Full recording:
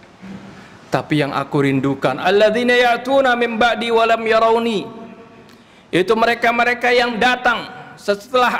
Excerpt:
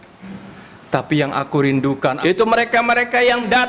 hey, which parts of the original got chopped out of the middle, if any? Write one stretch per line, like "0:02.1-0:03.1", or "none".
0:02.2-0:05.9